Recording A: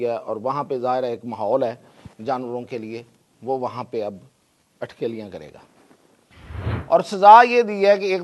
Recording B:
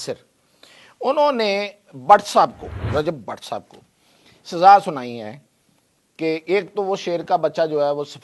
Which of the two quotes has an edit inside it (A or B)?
B